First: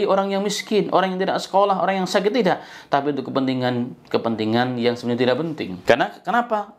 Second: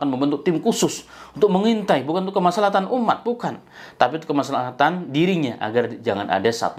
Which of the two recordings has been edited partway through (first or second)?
first